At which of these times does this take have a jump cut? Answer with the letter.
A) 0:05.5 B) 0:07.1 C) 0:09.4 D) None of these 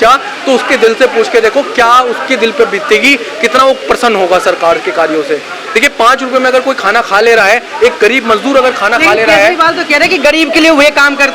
D